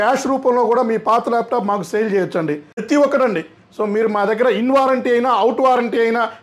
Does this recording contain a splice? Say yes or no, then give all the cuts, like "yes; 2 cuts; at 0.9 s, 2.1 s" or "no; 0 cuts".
yes; 1 cut; at 2.8 s